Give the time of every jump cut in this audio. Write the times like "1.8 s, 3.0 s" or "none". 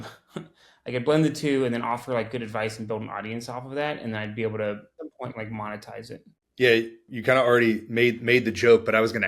5.0 s, 6.4 s, 7.1 s